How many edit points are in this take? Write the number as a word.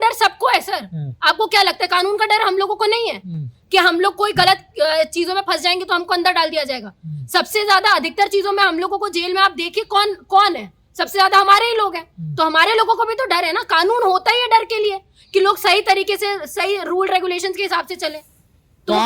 zero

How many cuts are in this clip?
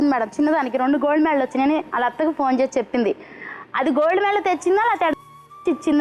zero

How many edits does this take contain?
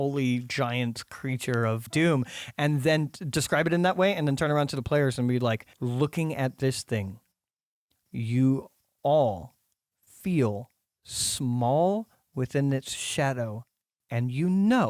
two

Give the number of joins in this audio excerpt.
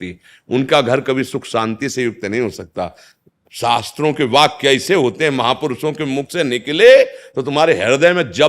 one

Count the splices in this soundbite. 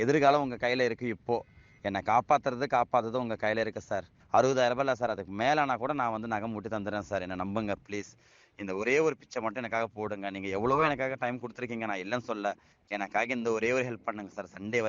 two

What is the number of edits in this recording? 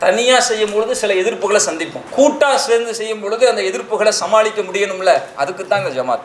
one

